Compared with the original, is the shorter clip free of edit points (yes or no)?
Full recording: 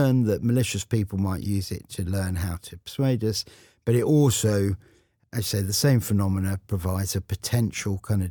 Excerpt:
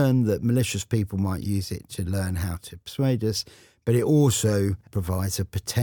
no